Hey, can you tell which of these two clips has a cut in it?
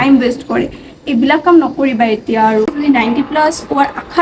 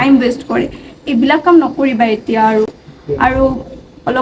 first; 1 cut; at 2.7 s

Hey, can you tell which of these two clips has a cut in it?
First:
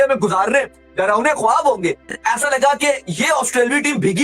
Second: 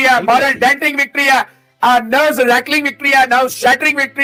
first; 1 cut; at 2.1 s

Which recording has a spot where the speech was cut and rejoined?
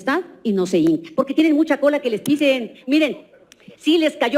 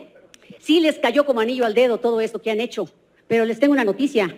first; 1 cut; at 1.1 s

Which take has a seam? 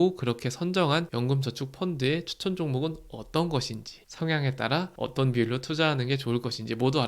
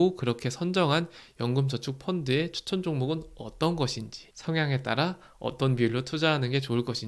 first; 2 cuts; at 1.1 s, 4.9 s

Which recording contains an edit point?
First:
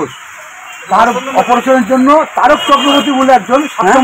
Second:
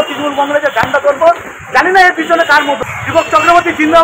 second; 1 cut; at 2.9 s

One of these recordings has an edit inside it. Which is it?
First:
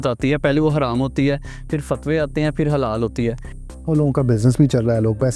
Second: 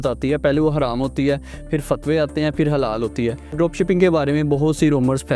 first; 1 cut; at 3.4 s

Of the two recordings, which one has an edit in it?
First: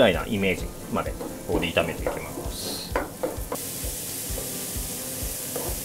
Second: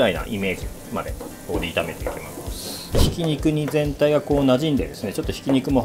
second; 1 cut; at 3.1 s

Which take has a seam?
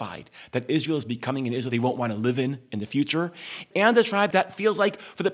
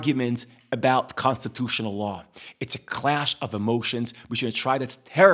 first; 3 cuts; at 1.7 s, 3.6 s, 4.3 s

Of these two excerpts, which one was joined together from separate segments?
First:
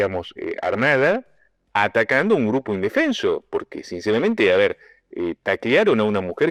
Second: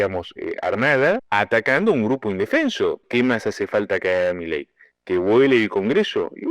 second; 2 cuts; at 1.2 s, 3.1 s

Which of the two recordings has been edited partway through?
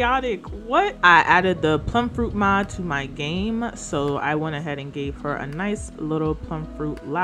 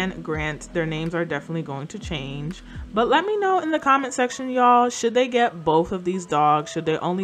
first; 1 cut; at 0.9 s

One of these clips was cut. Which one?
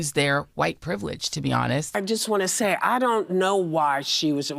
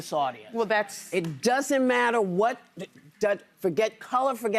first; 1 cut; at 1.9 s

